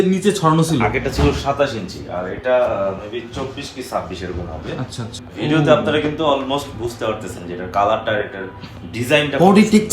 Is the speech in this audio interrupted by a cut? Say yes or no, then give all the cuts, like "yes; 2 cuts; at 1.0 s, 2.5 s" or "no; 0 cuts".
yes; 1 cut; at 5.1 s